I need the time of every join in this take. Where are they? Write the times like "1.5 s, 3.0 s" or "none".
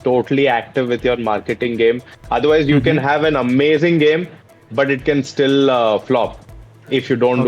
none